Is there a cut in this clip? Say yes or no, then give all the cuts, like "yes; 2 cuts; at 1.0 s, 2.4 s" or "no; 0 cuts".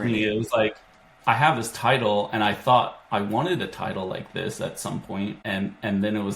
yes; 1 cut; at 5.4 s